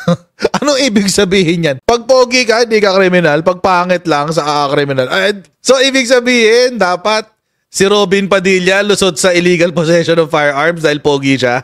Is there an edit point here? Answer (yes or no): no